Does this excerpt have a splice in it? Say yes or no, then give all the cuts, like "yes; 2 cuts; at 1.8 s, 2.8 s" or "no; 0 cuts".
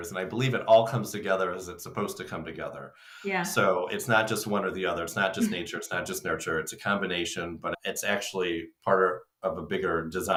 no; 0 cuts